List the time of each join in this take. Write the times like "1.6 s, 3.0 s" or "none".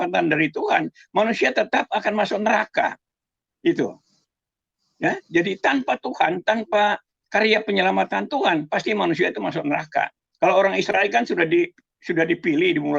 none